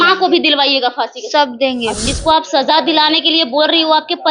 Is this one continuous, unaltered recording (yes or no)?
no